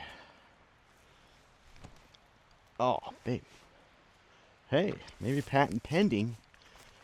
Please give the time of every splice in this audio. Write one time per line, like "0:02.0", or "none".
none